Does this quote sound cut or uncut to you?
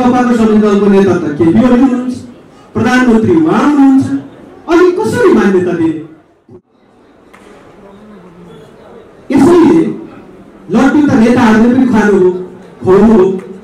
cut